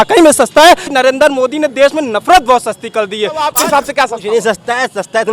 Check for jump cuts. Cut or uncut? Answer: cut